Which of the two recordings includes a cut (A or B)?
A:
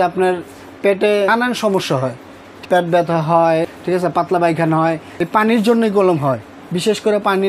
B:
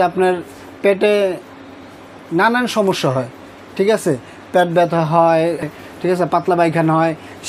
A